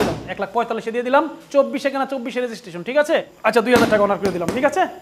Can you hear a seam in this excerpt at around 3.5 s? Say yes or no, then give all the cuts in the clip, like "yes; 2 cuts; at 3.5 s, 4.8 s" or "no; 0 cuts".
yes; 1 cut; at 3.5 s